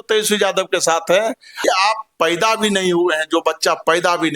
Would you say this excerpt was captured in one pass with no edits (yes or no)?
no